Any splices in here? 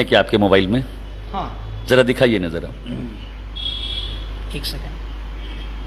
no; 0 cuts

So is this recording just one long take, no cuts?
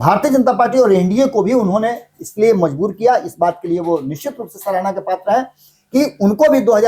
yes; 0 cuts

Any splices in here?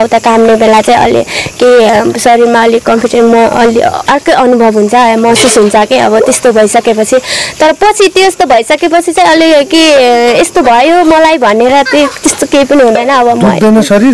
no; 0 cuts

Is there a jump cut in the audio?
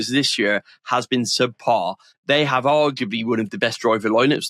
yes; 1 cut; at 2.1 s

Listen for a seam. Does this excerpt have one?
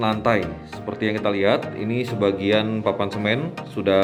no; 0 cuts

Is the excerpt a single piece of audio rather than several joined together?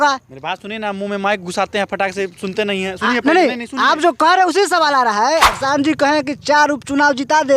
no; 1 cut; at 5.5 s

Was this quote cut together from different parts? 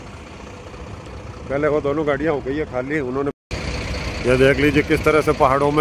yes; 1 cut; at 3.4 s

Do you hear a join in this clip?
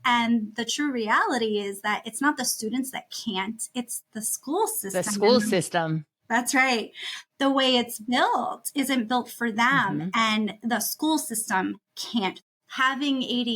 yes; 1 cut; at 12.4 s

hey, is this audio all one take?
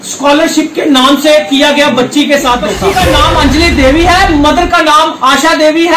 no; 1 cut; at 2.8 s

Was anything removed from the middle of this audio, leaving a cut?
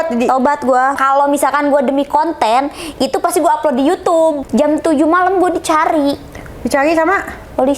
yes; 2 cuts; at 1.0 s, 4.4 s

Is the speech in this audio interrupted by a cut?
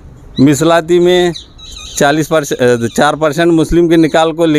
no; 0 cuts

